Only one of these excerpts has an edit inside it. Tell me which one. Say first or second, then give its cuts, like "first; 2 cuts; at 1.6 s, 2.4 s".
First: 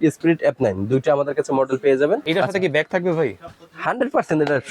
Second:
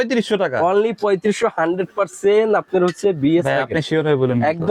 first; 1 cut; at 2.2 s